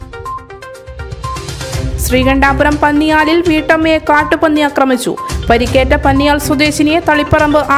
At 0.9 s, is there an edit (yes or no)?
yes